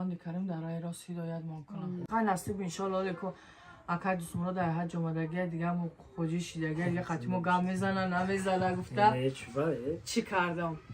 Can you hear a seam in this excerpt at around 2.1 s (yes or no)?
yes